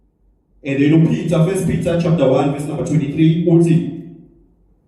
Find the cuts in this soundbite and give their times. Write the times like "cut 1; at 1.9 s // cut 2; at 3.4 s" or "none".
none